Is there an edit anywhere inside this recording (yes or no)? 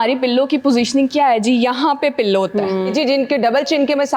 yes